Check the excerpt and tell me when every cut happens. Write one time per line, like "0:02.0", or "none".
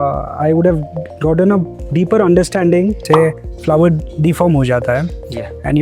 0:03.0